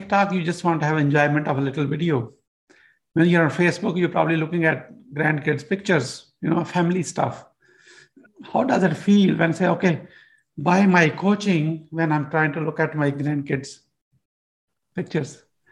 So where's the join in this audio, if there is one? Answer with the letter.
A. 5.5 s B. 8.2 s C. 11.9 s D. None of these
B